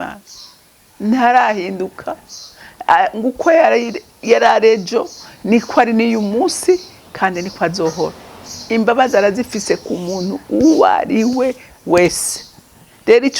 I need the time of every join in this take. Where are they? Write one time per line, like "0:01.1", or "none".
0:08.5